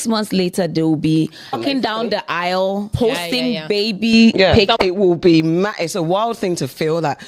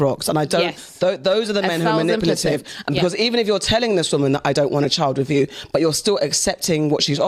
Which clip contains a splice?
first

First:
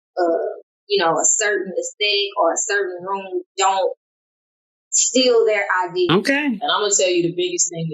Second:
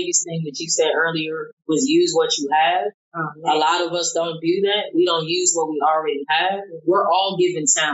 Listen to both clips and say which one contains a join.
first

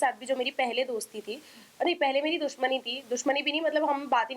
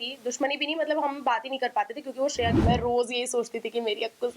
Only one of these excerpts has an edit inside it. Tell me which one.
second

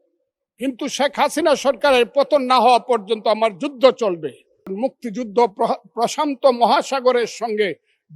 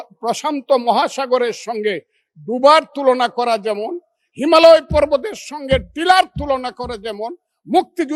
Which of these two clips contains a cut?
first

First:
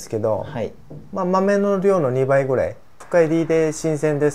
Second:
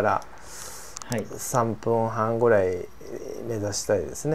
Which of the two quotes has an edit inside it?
first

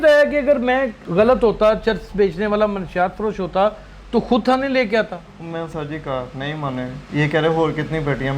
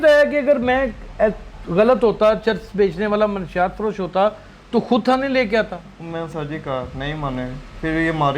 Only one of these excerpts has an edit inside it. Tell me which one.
first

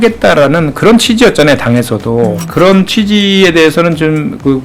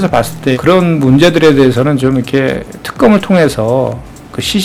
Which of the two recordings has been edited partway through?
first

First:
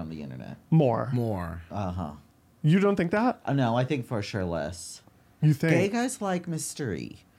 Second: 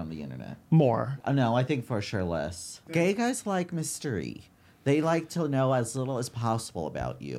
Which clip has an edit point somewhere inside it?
second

